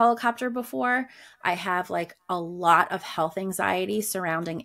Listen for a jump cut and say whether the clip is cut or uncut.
uncut